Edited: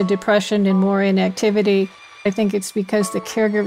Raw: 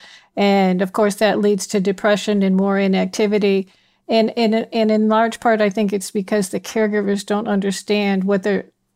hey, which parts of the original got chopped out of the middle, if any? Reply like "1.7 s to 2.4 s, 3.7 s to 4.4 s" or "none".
4.0 s to 5.6 s